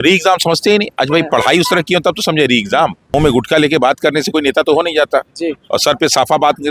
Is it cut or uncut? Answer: cut